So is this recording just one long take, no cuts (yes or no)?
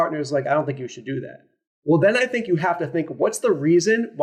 yes